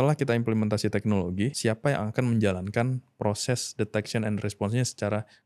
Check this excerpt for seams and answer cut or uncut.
cut